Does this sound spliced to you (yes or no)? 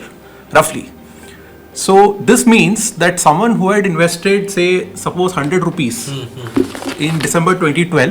no